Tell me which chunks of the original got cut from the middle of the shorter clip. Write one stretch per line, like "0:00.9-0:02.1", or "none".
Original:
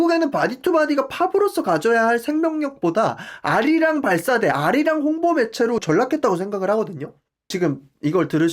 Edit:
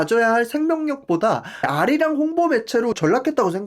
0:03.4-0:04.5